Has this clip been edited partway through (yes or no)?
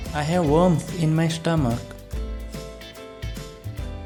no